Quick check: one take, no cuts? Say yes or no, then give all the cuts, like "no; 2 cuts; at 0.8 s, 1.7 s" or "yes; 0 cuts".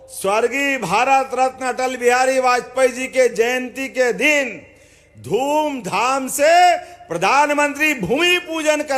yes; 0 cuts